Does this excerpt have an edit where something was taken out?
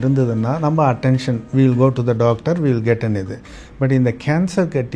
no; 0 cuts

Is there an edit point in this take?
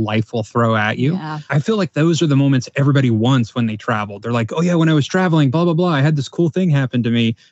yes; 1 cut; at 1.5 s

